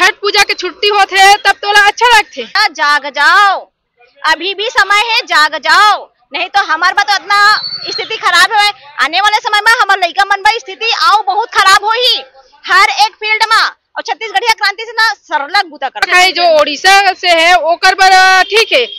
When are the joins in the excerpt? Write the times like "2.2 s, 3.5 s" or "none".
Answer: 2.5 s, 16.1 s